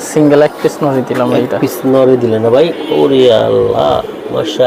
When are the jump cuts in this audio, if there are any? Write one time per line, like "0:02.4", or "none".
none